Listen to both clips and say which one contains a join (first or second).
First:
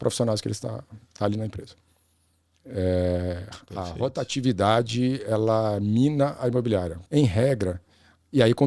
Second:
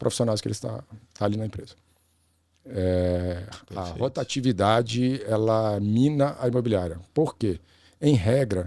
first